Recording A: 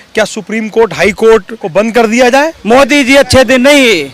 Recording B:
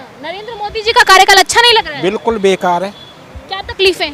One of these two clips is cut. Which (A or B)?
A